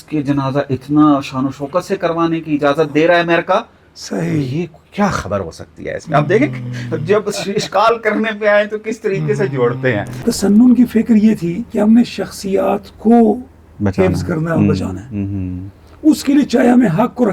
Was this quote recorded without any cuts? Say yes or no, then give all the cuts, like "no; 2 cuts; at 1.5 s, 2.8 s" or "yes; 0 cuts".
no; 1 cut; at 10.2 s